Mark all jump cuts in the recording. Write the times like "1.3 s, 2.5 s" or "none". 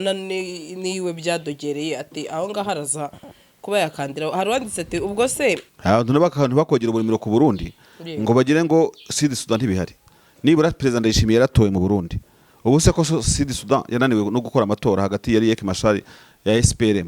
5.7 s